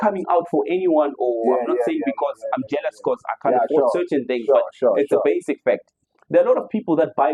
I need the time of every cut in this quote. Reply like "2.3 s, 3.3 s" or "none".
none